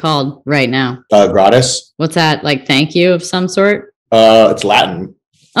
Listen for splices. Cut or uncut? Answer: cut